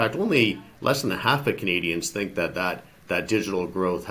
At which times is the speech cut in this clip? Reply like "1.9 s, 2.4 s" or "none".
none